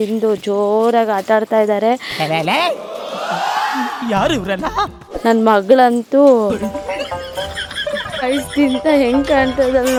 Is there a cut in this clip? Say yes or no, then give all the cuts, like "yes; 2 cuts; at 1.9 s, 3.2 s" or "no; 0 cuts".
no; 0 cuts